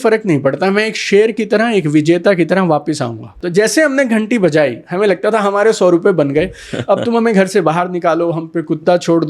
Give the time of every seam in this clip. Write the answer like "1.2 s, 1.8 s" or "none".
3.3 s